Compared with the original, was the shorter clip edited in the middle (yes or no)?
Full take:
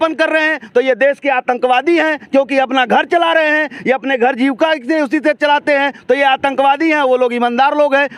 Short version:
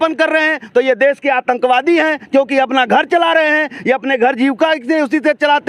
no